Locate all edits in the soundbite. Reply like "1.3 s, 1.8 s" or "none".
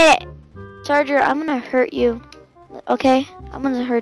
none